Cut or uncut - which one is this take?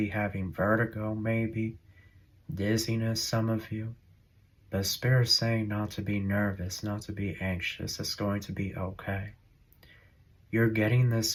uncut